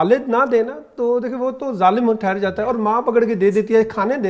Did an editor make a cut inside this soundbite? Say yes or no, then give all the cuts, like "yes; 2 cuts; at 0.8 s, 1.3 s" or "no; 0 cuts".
no; 0 cuts